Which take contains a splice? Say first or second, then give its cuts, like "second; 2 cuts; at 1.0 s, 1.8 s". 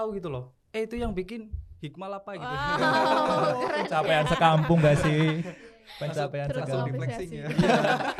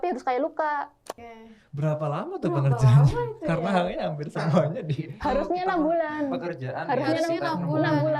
second; 1 cut; at 1.2 s